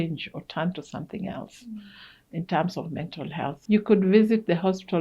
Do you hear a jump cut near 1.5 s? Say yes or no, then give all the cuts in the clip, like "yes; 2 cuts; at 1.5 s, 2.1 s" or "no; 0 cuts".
no; 1 cut; at 3.6 s